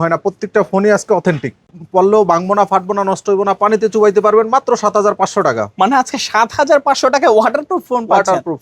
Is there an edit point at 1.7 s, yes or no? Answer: yes